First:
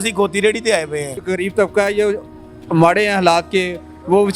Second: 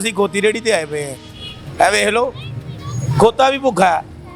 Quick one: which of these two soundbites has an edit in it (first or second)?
first